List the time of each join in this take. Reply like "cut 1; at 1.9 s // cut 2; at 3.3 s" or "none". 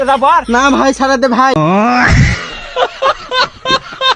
cut 1; at 1.5 s